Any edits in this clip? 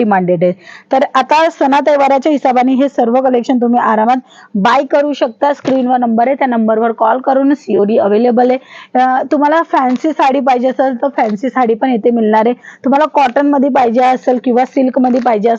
no; 0 cuts

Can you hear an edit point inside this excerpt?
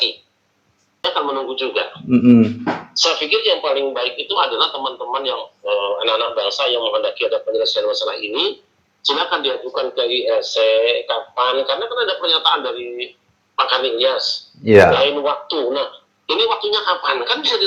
yes; 1 cut; at 1.0 s

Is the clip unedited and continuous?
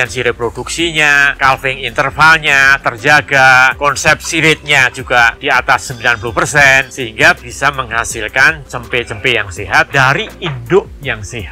no; 4 cuts; at 1.3 s, 3.7 s, 6.9 s, 9.9 s

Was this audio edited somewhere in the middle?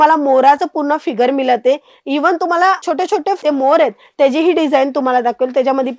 yes; 1 cut; at 3.4 s

